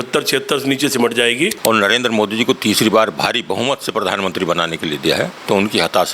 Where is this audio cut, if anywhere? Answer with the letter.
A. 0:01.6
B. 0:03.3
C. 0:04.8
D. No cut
A